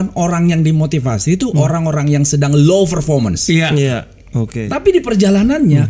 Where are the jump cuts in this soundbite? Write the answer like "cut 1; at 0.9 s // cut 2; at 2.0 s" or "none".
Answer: cut 1; at 4.6 s